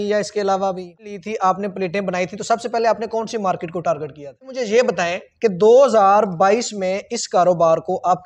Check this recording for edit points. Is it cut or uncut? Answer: cut